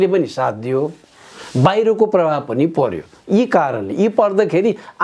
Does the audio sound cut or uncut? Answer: uncut